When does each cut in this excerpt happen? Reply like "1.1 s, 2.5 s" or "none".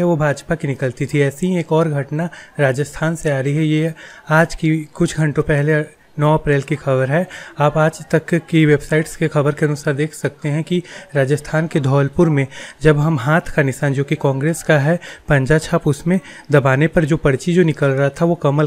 none